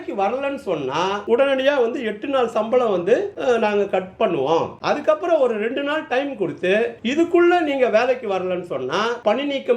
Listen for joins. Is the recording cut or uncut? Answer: cut